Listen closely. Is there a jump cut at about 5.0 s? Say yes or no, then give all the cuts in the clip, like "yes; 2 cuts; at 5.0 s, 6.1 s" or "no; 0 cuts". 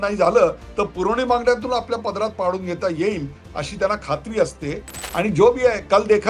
yes; 1 cut; at 5.0 s